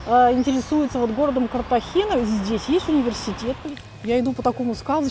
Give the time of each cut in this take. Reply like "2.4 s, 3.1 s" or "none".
3.5 s